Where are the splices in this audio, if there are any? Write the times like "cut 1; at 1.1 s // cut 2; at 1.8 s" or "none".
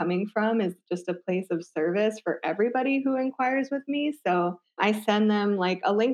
cut 1; at 4.8 s

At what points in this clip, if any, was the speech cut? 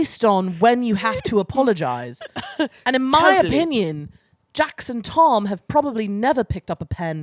none

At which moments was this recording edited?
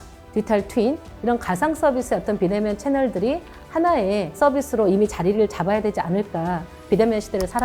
cut 1; at 6.8 s

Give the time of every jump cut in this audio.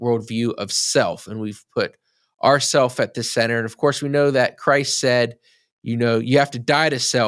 none

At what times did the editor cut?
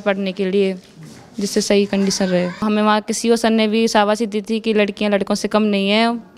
cut 1; at 2.6 s

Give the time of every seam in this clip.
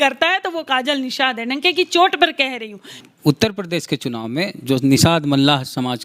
cut 1; at 3.0 s

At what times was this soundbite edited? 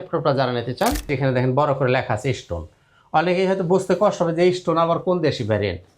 cut 1; at 1.1 s

